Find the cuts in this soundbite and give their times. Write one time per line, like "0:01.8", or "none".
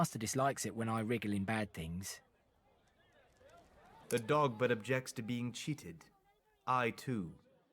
0:04.0